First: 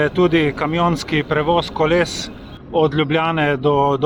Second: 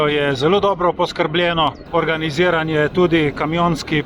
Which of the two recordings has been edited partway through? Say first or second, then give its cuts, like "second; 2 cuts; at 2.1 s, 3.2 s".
second; 1 cut; at 1.8 s